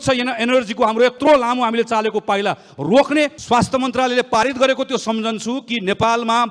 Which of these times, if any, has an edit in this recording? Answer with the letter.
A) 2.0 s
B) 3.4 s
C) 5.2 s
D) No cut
B